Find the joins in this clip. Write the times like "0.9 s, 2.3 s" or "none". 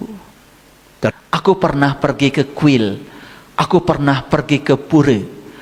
1.1 s